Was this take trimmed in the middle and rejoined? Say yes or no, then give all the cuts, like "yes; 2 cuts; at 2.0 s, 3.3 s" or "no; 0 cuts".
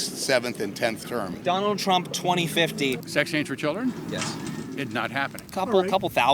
yes; 3 cuts; at 1.3 s, 3.0 s, 5.4 s